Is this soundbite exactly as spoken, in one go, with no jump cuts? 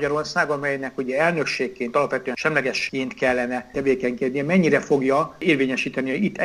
no; 2 cuts; at 3.7 s, 5.4 s

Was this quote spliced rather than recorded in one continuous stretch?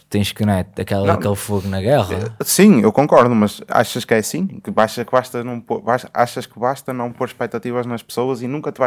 no; 0 cuts

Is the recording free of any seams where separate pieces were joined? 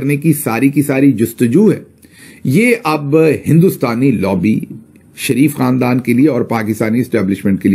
yes; 0 cuts

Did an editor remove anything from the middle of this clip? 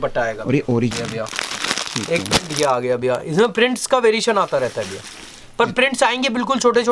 yes; 1 cut; at 0.9 s

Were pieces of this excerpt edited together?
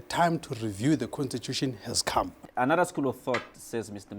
yes; 1 cut; at 2.4 s

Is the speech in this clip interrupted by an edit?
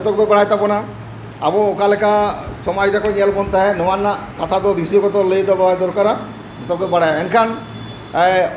no; 0 cuts

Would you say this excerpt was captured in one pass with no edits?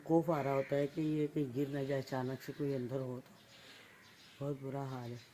yes; 0 cuts

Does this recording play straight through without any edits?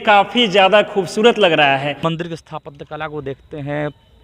no; 1 cut; at 2.0 s

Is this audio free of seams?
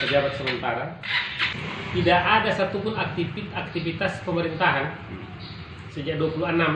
no; 1 cut; at 1.5 s

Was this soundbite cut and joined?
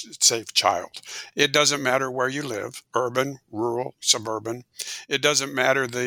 yes; 2 cuts; at 1.2 s, 2.8 s

